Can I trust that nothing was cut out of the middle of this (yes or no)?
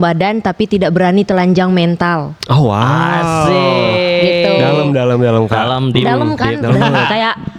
yes